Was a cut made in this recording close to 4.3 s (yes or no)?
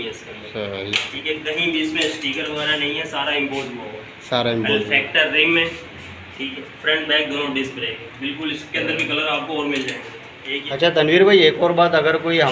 no